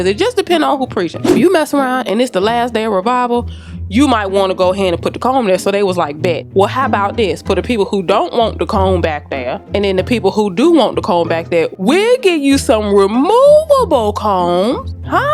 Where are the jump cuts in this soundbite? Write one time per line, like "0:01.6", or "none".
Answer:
none